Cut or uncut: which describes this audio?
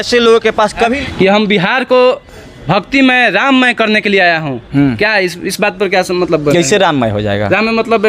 cut